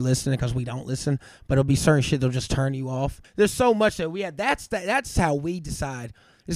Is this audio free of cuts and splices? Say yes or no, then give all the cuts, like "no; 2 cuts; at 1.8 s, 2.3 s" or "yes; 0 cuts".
no; 1 cut; at 3.4 s